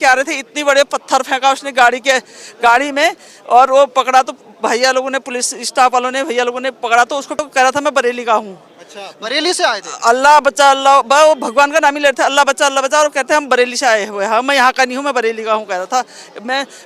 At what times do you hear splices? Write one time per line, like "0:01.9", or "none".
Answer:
0:07.4